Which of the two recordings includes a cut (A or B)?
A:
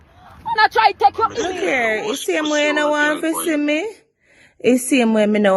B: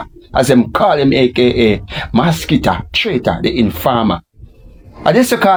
A